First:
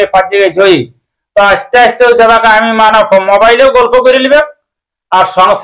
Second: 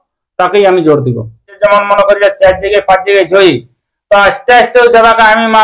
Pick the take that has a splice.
second; 1 cut; at 1.6 s

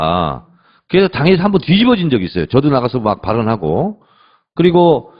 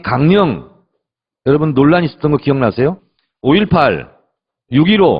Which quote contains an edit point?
second; 1 cut; at 2.4 s

